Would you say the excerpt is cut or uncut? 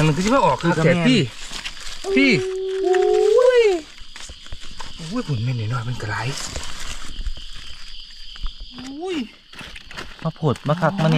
cut